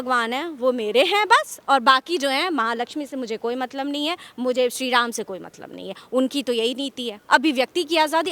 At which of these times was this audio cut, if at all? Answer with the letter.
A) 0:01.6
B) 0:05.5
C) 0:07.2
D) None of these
C